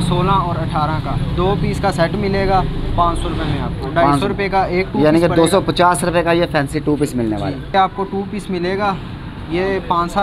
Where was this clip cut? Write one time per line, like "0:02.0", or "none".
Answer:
0:07.7

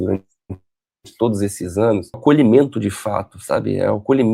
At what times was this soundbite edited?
0:02.2

